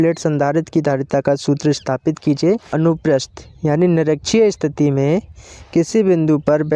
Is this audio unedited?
no; 1 cut; at 2.7 s

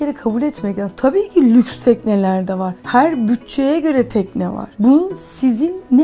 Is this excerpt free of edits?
yes; 0 cuts

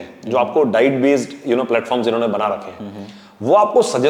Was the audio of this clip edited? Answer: no; 0 cuts

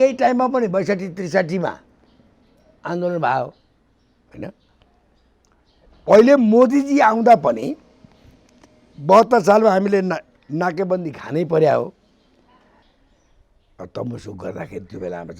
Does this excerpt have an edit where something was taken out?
yes; 1 cut; at 12.8 s

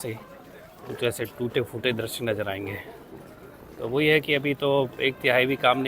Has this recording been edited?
no; 0 cuts

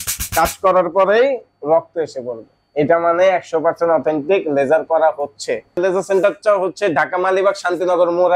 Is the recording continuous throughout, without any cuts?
no; 1 cut; at 5.8 s

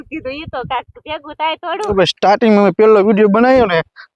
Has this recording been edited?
yes; 1 cut; at 1.9 s

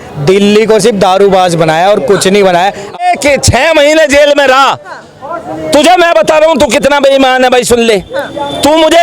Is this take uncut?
no; 1 cut; at 3.1 s

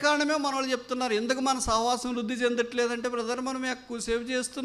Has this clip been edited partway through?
no; 0 cuts

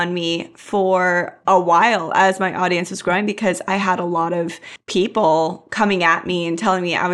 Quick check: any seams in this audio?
no; 0 cuts

